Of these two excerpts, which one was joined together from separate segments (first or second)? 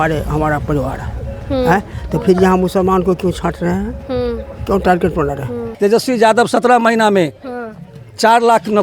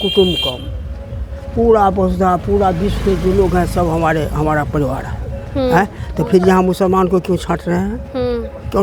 first